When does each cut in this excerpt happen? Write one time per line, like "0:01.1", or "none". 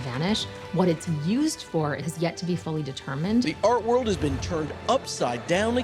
0:02.1
0:03.4